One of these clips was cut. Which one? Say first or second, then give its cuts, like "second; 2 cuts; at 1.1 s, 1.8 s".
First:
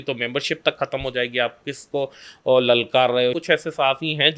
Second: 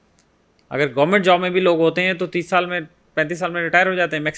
first; 1 cut; at 3.4 s